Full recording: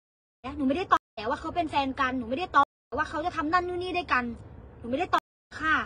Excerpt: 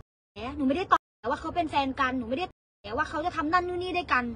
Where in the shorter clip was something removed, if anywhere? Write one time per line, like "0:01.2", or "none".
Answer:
none